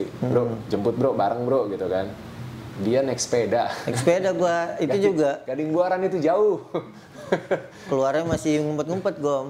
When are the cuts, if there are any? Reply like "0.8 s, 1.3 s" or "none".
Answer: none